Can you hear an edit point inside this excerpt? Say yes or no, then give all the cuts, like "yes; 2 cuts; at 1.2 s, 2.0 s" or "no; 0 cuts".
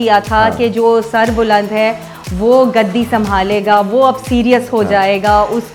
no; 0 cuts